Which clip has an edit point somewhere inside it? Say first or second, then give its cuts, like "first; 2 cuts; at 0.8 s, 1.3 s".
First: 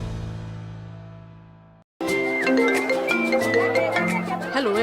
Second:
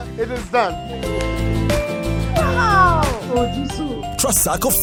first; 1 cut; at 1.6 s